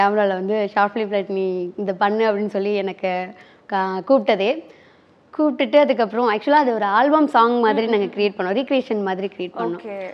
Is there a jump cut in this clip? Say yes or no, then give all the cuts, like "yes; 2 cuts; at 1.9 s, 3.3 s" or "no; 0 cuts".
no; 0 cuts